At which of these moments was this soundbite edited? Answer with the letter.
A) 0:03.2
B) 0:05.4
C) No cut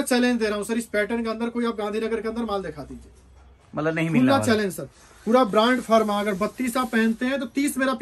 C